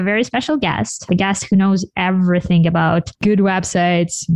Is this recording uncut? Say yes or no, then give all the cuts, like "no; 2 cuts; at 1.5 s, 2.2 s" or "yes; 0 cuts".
no; 1 cut; at 1.1 s